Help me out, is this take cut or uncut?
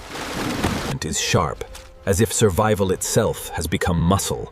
cut